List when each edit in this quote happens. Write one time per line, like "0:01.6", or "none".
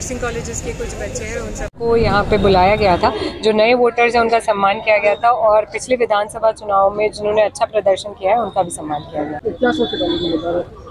0:09.3